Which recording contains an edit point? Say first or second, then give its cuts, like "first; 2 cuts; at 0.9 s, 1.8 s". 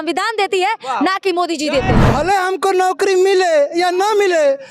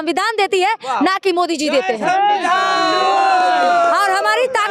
first; 1 cut; at 2.0 s